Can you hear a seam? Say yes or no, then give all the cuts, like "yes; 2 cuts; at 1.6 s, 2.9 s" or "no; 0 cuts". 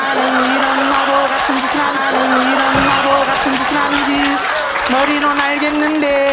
yes; 2 cuts; at 2.0 s, 3.9 s